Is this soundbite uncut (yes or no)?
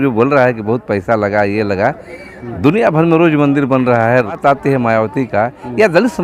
no